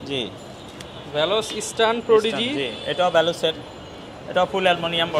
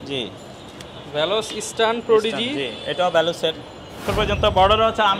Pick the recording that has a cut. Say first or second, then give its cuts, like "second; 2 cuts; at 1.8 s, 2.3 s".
second; 1 cut; at 4.1 s